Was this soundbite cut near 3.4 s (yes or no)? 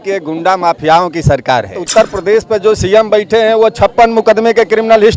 no